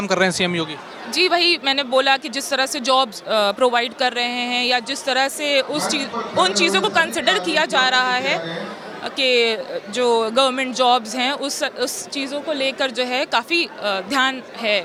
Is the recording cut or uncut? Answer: uncut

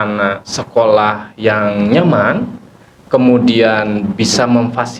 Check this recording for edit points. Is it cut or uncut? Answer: uncut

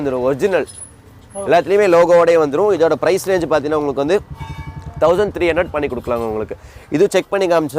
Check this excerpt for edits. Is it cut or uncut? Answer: uncut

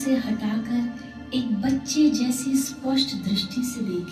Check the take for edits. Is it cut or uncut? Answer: uncut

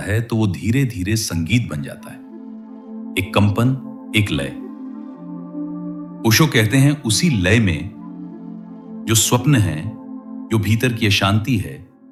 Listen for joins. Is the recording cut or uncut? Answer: uncut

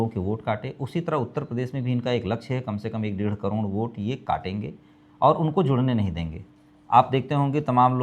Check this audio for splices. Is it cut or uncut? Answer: uncut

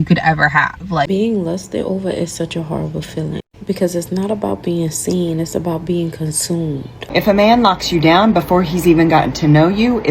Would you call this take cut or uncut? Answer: cut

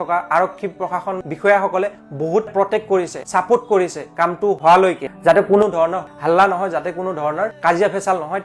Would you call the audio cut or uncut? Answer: uncut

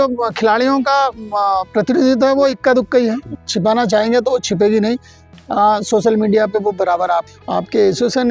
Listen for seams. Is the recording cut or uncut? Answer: cut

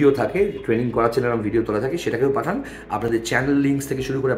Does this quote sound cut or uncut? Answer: uncut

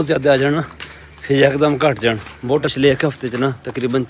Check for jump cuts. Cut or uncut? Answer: cut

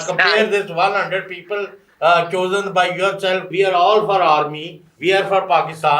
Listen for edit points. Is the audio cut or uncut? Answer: cut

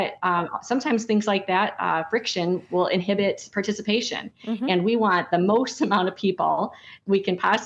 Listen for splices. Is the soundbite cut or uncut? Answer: uncut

